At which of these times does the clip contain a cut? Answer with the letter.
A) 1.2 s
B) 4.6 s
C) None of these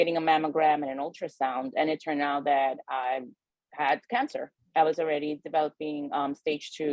B